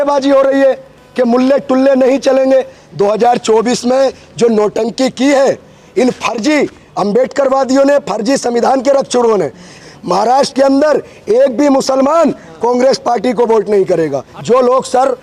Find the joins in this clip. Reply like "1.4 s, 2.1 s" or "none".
2.8 s, 9.8 s, 14.3 s